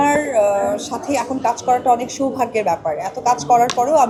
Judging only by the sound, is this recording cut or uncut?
uncut